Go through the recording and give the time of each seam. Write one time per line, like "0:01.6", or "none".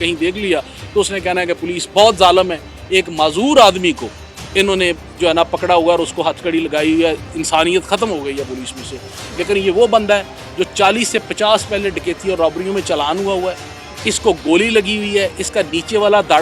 none